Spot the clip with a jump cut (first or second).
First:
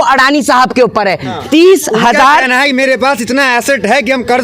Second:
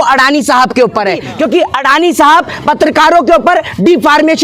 second